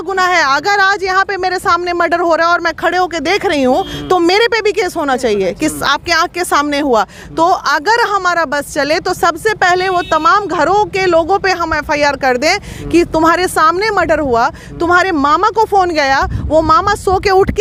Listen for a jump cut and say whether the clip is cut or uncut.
uncut